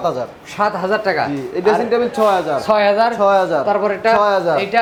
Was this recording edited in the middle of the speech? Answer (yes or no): no